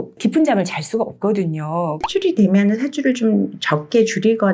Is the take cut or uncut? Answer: cut